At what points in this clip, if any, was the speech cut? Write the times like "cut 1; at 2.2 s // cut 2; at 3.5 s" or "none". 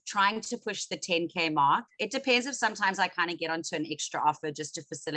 none